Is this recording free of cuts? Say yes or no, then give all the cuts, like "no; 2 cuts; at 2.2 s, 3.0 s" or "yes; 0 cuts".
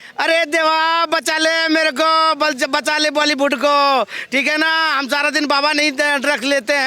yes; 0 cuts